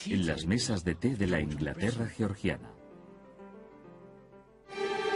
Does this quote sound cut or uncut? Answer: uncut